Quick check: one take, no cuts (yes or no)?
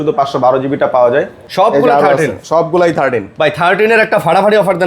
no